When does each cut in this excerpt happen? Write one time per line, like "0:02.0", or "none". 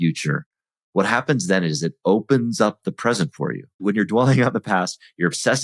0:03.8